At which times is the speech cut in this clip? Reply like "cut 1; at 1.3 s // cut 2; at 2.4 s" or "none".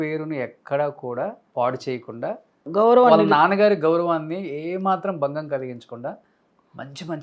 cut 1; at 1.4 s // cut 2; at 2.6 s